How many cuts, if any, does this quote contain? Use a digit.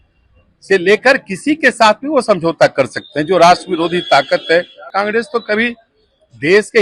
1